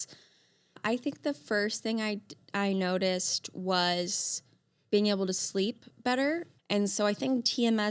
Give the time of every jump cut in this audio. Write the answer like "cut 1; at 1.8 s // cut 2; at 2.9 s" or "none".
cut 1; at 0.8 s // cut 2; at 6.5 s

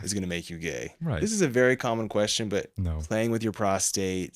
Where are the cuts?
cut 1; at 1.0 s // cut 2; at 2.8 s

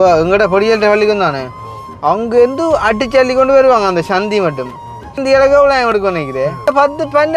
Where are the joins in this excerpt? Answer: cut 1; at 5.2 s // cut 2; at 6.7 s

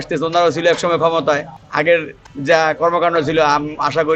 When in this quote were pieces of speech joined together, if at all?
none

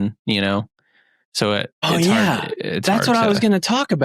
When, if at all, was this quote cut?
cut 1; at 1.8 s

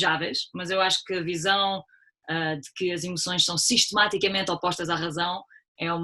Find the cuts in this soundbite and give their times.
none

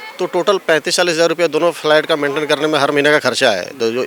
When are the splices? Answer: none

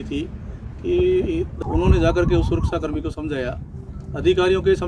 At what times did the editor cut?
cut 1; at 1.5 s

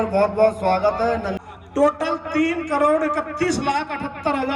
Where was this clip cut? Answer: cut 1; at 1.4 s

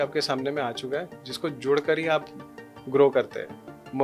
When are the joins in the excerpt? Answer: none

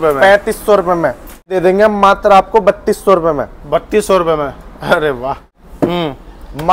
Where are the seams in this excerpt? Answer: cut 1; at 1.5 s // cut 2; at 5.6 s

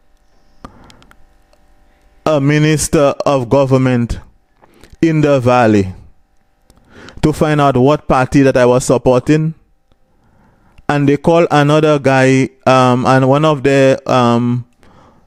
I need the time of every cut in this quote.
none

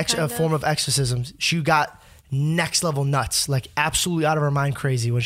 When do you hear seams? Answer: none

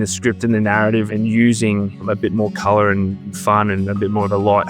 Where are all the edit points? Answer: cut 1; at 1.1 s // cut 2; at 2.0 s // cut 3; at 3.2 s

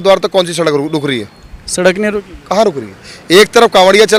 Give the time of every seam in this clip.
none

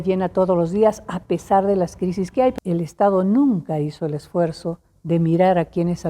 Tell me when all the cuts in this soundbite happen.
cut 1; at 2.6 s

